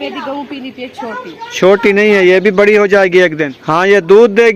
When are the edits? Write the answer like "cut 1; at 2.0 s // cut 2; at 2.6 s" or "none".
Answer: cut 1; at 3.2 s